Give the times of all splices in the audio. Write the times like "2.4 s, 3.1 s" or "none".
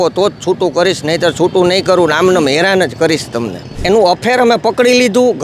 3.7 s

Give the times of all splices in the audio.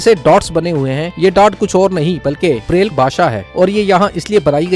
none

